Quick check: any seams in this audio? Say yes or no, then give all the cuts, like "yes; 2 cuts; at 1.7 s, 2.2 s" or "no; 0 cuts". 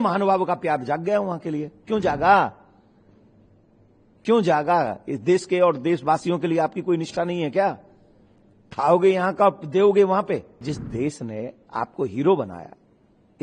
yes; 1 cut; at 10.5 s